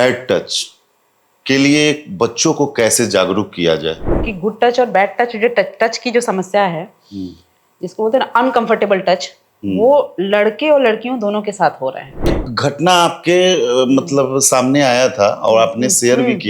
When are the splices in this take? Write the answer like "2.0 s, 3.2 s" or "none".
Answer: 4.1 s, 12.4 s